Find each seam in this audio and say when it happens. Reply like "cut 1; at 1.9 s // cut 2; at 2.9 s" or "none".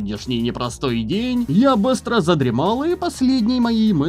cut 1; at 1.5 s